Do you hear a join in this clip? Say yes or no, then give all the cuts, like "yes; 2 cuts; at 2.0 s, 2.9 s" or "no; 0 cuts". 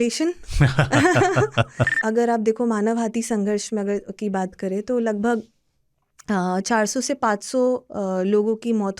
yes; 1 cut; at 1.9 s